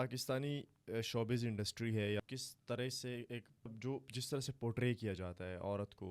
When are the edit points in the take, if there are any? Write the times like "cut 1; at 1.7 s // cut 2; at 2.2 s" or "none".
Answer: cut 1; at 2.2 s // cut 2; at 3.8 s

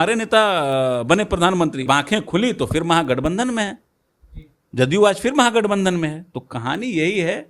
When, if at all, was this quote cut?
cut 1; at 1.9 s

